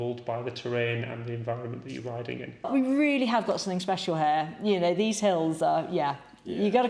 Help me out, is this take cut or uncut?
cut